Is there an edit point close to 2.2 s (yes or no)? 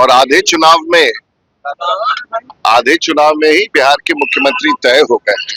no